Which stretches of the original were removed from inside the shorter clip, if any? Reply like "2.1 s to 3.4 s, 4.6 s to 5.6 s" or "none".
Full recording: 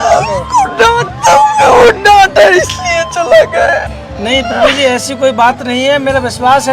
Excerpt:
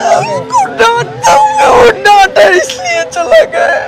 none